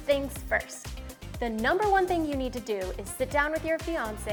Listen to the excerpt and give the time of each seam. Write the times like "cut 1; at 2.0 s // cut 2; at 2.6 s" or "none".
none